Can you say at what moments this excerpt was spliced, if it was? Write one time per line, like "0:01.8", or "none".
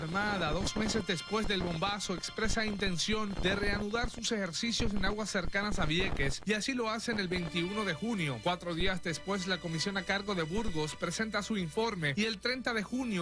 0:06.7